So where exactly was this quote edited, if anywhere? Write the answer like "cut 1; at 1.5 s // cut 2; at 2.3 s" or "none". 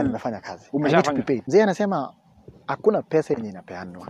cut 1; at 1.4 s